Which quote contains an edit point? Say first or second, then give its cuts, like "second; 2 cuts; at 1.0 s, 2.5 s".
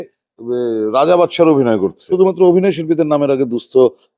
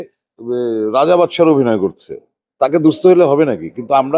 first; 1 cut; at 2.1 s